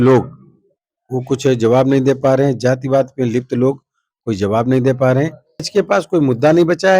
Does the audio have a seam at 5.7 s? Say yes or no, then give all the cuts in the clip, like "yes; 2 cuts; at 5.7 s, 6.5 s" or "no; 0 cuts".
yes; 1 cut; at 5.7 s